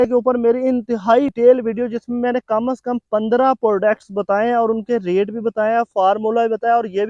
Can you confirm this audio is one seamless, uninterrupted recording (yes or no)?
no